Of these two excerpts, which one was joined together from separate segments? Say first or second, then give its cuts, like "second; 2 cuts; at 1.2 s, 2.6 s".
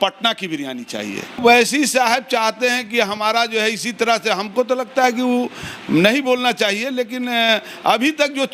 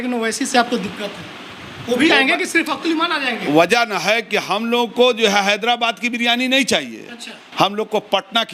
first; 1 cut; at 1.4 s